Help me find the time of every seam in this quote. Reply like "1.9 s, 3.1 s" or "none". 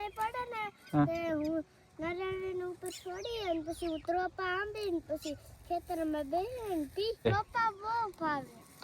7.4 s